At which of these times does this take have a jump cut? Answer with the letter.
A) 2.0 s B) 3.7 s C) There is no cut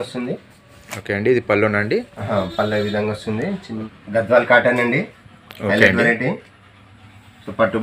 B